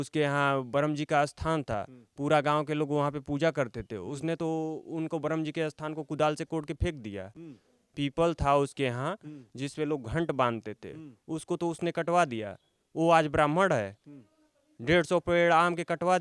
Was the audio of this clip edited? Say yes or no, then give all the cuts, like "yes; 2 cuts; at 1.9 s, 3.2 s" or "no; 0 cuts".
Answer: no; 0 cuts